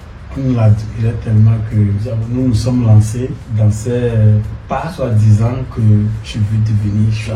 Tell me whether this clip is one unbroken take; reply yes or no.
no